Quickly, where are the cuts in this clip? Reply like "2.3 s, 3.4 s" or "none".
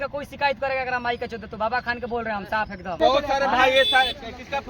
3.0 s